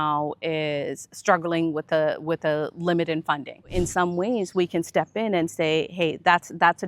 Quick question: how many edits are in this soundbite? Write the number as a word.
one